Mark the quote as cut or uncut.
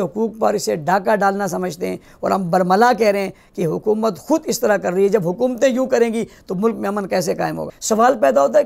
cut